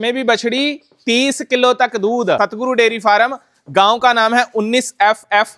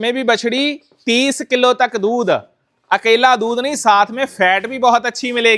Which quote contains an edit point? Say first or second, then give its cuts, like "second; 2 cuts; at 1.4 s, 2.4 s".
first; 1 cut; at 2.4 s